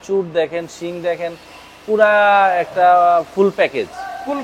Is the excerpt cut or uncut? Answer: uncut